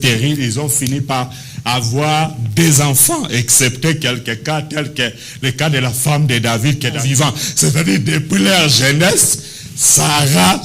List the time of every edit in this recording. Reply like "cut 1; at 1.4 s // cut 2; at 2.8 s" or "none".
cut 1; at 7.0 s